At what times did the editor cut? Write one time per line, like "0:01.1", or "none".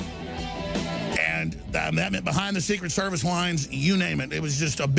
0:03.8

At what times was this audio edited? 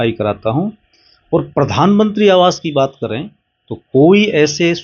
none

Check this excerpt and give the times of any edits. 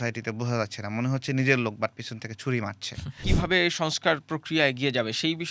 0:03.3

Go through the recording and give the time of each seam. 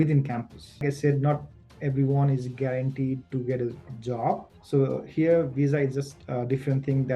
0:00.8
0:04.6

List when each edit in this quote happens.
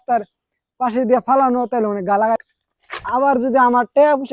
0:02.4

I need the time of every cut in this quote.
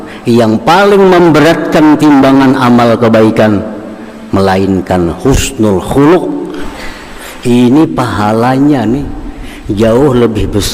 0:06.6

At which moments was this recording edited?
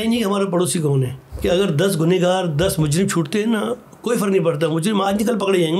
0:01.2

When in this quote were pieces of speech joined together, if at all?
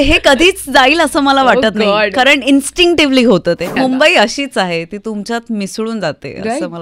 0:03.7

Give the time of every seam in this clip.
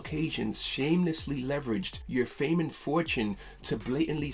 0:02.0

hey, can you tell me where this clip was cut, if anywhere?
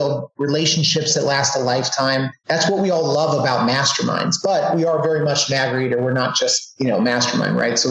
none

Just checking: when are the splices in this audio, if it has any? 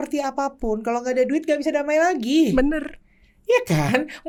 none

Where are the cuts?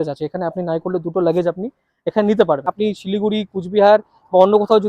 0:02.7

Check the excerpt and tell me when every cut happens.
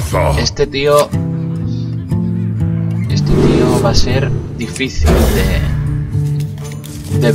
0:01.1

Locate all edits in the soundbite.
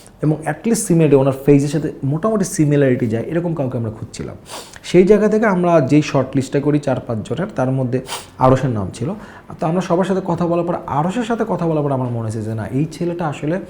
none

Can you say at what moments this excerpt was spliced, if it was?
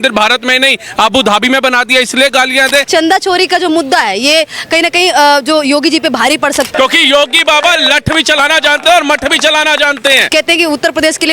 0:02.9
0:06.7
0:10.3

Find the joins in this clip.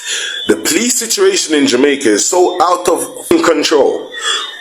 0:03.2

